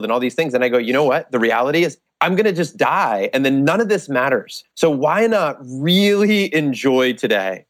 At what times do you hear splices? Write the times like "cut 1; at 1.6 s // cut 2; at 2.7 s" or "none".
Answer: cut 1; at 2.0 s // cut 2; at 4.6 s

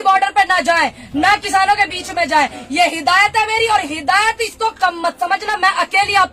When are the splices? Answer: none

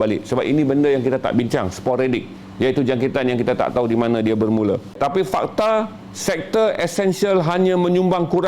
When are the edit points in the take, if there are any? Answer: cut 1; at 5.0 s

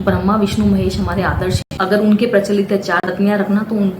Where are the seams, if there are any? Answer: cut 1; at 1.8 s // cut 2; at 3.0 s

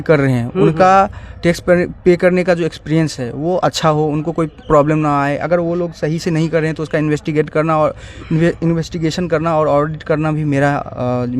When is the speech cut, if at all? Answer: none

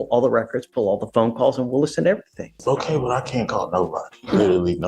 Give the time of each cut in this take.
cut 1; at 2.6 s

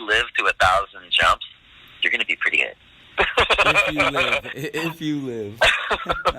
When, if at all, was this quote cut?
cut 1; at 2.5 s

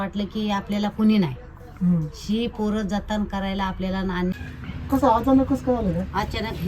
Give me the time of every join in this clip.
cut 1; at 4.3 s

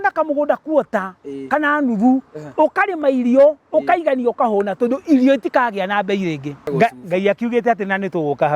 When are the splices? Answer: cut 1; at 6.6 s

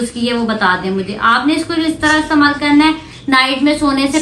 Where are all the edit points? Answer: none

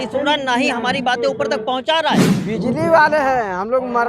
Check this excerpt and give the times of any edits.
cut 1; at 2.3 s

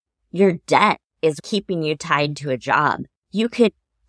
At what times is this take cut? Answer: cut 1; at 1.4 s

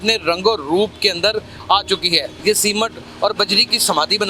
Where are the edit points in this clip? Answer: cut 1; at 2.3 s

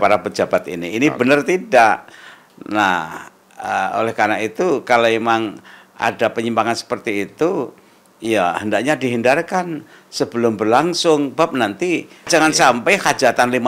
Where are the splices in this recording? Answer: cut 1; at 12.3 s

